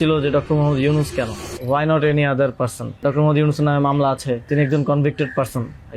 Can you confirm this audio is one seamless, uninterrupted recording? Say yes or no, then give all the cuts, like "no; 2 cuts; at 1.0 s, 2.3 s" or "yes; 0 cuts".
no; 3 cuts; at 1.5 s, 3.0 s, 4.5 s